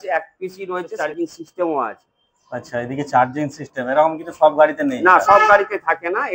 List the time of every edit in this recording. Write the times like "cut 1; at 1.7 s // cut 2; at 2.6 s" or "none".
cut 1; at 0.9 s